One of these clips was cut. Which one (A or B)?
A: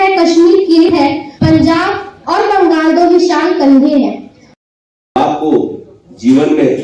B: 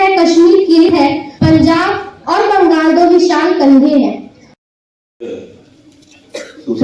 A